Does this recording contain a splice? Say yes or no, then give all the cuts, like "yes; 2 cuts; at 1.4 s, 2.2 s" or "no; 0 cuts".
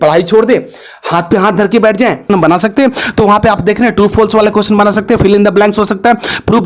yes; 1 cut; at 2.3 s